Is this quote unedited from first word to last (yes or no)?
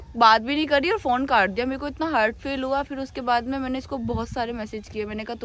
yes